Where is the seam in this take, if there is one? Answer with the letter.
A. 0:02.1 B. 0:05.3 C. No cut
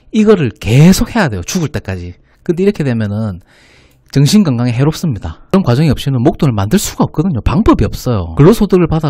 B